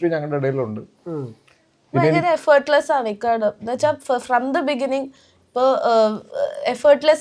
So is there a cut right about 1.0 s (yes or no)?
no